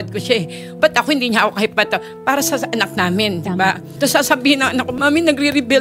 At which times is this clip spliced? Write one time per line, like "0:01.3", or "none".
0:03.9
0:04.9